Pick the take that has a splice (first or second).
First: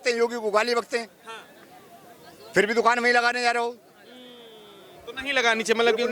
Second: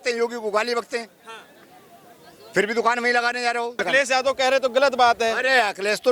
second